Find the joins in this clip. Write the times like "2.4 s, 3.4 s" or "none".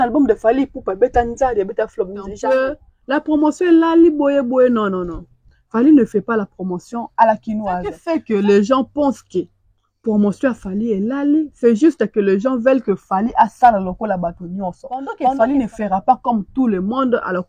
2.4 s, 8.0 s, 15.2 s